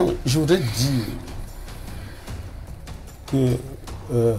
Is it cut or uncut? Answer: uncut